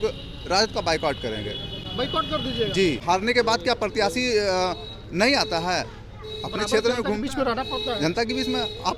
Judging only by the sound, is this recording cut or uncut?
uncut